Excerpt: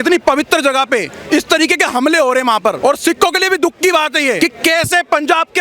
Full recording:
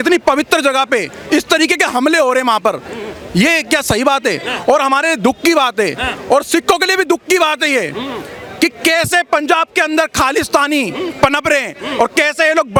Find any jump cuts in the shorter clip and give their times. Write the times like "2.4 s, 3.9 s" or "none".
2.8 s, 4.4 s